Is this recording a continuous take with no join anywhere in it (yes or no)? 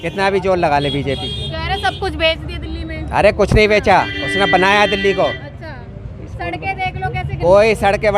yes